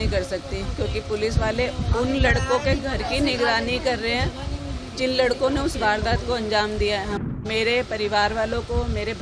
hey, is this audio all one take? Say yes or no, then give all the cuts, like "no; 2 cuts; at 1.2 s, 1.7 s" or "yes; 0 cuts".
no; 1 cut; at 7.2 s